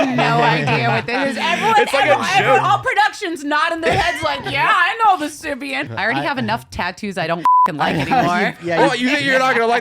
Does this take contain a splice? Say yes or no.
yes